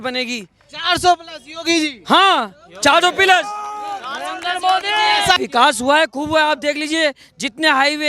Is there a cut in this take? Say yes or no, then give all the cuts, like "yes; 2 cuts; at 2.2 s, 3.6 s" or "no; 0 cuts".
yes; 1 cut; at 5.4 s